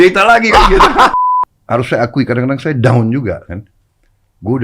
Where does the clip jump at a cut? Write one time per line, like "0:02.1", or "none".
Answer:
0:01.1